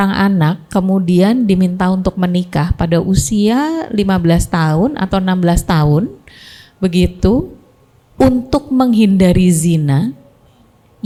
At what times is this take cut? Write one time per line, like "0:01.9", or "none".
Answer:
none